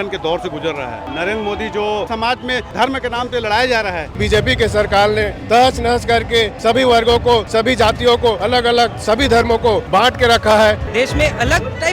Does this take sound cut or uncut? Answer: cut